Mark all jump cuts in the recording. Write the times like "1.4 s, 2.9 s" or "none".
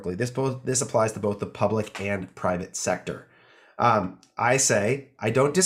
none